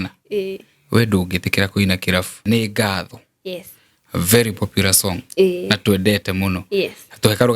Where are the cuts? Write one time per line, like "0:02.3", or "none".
0:02.4